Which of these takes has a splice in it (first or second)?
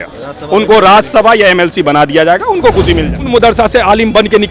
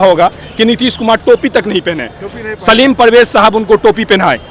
first